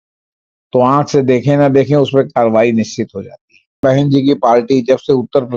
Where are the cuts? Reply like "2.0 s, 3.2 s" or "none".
3.8 s